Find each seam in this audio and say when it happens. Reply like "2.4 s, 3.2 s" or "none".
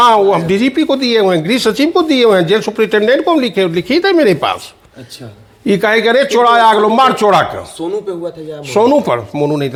none